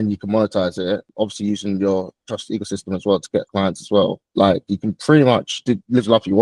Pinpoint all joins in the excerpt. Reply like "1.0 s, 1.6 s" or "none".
1.1 s, 4.2 s, 5.5 s